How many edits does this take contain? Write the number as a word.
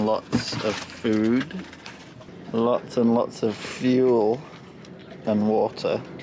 zero